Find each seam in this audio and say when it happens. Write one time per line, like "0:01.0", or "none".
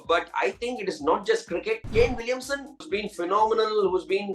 0:01.9
0:02.8